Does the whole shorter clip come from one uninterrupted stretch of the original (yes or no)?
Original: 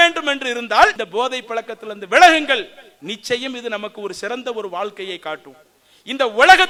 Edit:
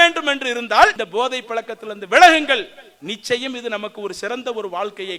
yes